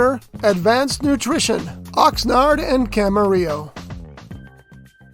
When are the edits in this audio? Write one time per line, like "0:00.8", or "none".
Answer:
0:03.6